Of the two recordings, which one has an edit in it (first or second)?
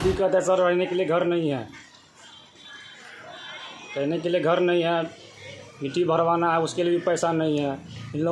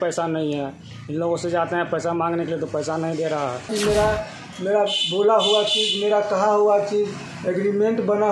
second